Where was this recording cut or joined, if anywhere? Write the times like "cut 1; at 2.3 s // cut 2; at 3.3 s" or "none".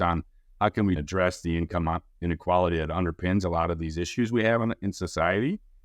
cut 1; at 1.0 s